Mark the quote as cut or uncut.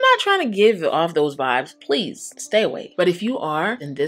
uncut